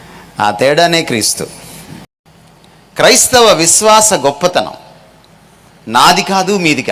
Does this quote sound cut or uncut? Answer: cut